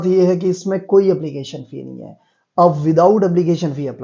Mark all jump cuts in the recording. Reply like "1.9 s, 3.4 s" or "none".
none